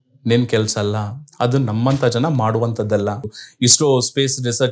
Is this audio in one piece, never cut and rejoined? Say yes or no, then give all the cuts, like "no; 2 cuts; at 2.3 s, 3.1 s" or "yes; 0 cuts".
no; 1 cut; at 3.4 s